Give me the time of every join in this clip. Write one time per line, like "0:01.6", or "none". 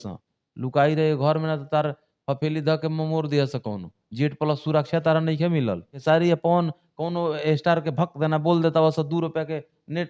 0:06.0